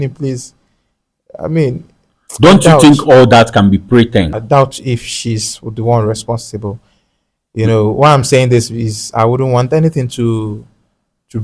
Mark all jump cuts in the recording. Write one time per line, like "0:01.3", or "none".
0:04.4